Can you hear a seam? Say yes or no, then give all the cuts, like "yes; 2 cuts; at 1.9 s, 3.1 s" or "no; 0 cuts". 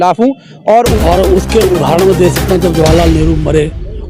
yes; 1 cut; at 0.9 s